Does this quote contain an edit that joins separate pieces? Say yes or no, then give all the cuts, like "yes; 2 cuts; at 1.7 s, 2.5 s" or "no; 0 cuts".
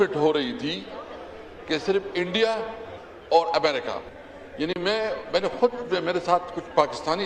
no; 0 cuts